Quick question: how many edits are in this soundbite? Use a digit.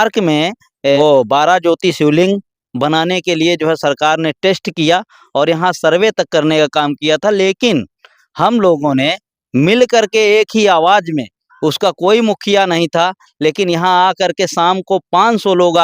1